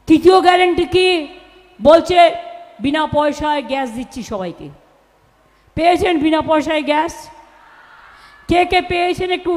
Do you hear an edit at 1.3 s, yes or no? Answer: no